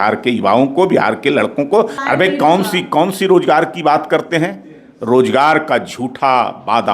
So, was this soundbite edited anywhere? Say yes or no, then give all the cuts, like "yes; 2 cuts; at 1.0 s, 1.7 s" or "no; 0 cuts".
yes; 1 cut; at 2.0 s